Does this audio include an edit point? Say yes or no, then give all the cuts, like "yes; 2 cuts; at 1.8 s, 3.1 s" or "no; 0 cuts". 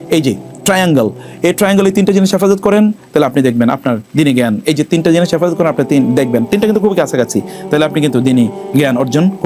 no; 0 cuts